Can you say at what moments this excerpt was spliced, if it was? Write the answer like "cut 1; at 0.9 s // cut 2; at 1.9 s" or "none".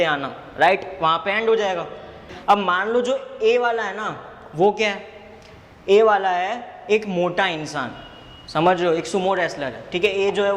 cut 1; at 2.2 s